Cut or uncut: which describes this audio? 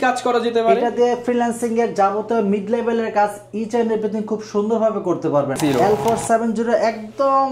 cut